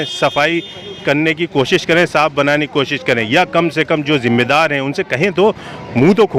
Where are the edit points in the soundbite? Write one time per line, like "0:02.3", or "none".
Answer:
none